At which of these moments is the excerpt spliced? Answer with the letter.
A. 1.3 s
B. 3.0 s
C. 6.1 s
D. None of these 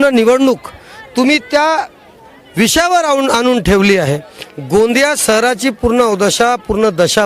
D